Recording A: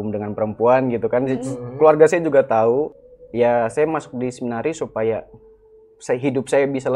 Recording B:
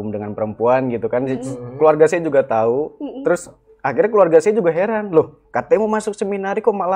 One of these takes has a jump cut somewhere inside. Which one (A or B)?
A